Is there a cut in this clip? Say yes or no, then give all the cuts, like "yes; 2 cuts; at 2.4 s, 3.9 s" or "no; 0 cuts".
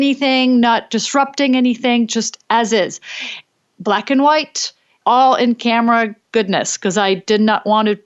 no; 0 cuts